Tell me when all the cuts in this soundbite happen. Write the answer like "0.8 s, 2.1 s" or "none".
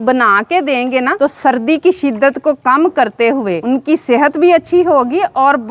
1.1 s, 3.6 s